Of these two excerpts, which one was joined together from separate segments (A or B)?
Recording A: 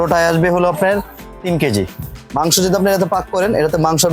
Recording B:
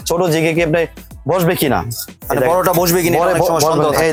A